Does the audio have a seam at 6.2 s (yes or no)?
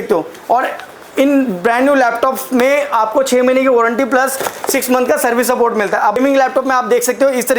yes